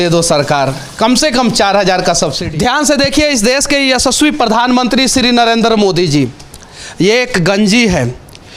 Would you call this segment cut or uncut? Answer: cut